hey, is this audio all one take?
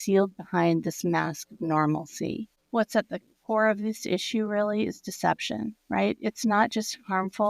no; 1 cut; at 2.5 s

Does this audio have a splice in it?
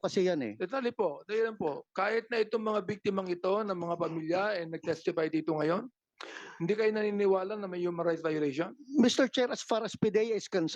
no; 0 cuts

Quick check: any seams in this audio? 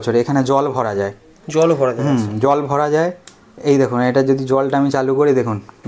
no; 0 cuts

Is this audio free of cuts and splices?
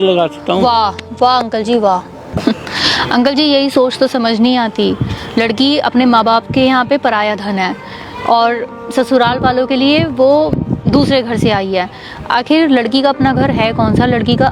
no; 1 cut; at 2.3 s

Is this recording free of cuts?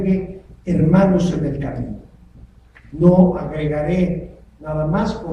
yes; 0 cuts

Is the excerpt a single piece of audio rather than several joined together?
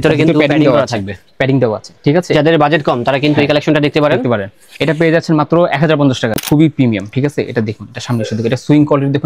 no; 1 cut; at 6.4 s

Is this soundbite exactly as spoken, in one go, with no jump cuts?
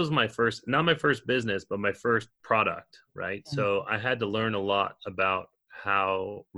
no; 1 cut; at 2.3 s

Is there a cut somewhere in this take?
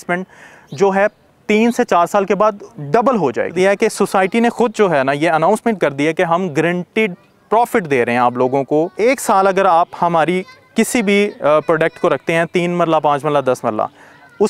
yes; 2 cuts; at 3.5 s, 8.9 s

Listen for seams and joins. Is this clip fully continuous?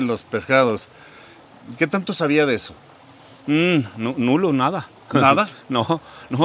yes; 0 cuts

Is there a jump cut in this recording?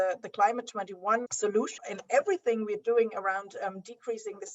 yes; 1 cut; at 1.4 s

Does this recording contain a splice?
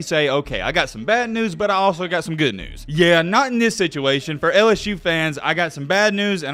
no; 0 cuts

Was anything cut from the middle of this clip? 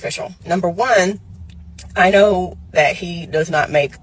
no; 0 cuts

